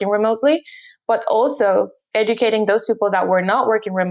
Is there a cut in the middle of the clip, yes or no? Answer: yes